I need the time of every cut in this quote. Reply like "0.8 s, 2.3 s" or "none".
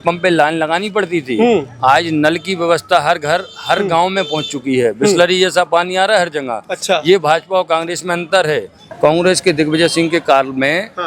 8.9 s